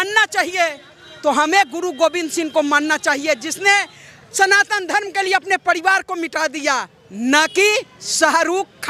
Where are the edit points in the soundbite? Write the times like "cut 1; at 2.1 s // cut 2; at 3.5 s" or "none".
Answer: none